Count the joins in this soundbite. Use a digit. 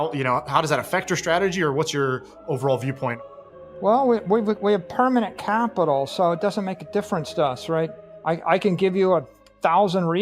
2